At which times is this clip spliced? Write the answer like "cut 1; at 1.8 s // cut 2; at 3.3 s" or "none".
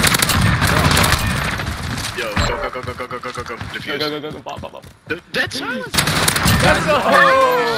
cut 1; at 5.9 s